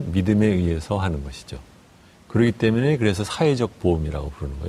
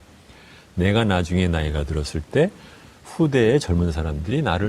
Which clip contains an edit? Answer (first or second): second